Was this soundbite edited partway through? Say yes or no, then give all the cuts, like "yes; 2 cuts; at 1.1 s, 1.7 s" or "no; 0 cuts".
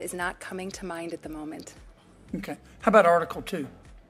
no; 0 cuts